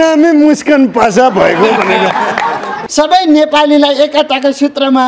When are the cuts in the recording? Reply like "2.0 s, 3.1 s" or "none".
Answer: 2.7 s

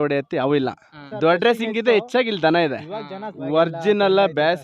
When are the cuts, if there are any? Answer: 1.4 s, 3.4 s

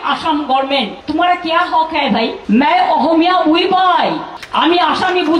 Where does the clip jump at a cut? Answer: 1.0 s, 2.4 s, 4.3 s

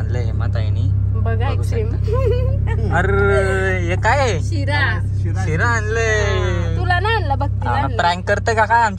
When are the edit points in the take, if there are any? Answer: none

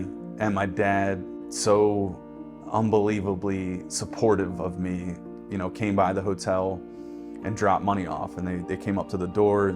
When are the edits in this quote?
1.4 s

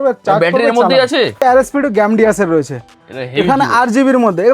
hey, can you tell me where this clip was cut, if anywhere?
1.4 s

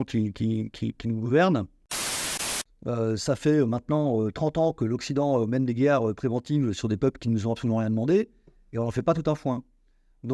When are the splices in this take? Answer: 2.2 s

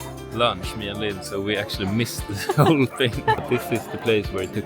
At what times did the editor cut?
3.4 s

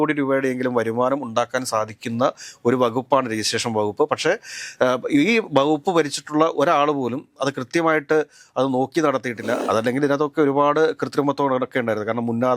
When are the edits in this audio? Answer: 9.6 s

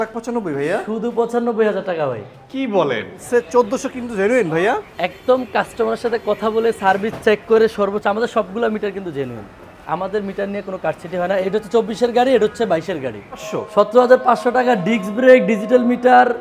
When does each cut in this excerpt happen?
3.2 s, 11.5 s, 13.4 s

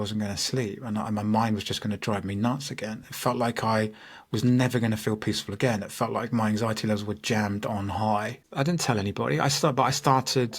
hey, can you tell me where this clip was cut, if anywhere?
8.4 s

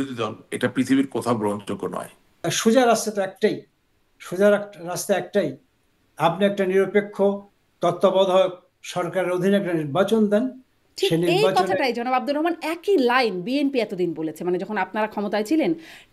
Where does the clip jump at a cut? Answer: 2.5 s

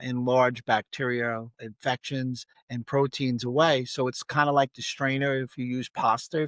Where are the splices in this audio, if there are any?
1.7 s, 2.5 s

